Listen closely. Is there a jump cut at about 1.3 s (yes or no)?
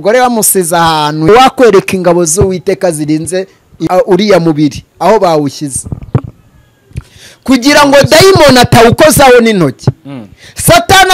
yes